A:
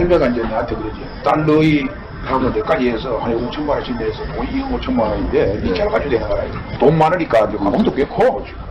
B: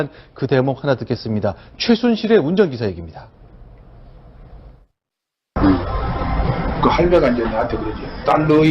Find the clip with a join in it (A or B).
B